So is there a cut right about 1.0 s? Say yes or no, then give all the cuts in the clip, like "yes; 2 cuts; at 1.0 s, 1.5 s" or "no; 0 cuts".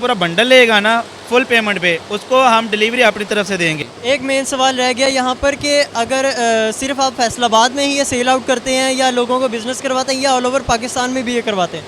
no; 1 cut; at 3.8 s